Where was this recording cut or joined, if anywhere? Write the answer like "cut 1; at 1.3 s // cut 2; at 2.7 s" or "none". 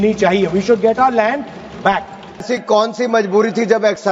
cut 1; at 2.5 s